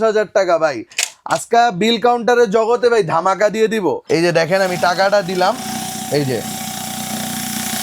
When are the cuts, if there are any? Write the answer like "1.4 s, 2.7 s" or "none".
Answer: 4.0 s